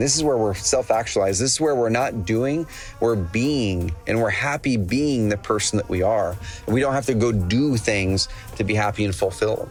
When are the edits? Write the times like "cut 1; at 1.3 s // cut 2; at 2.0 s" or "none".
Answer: none